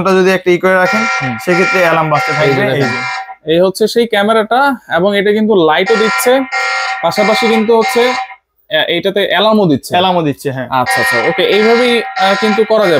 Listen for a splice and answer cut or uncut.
uncut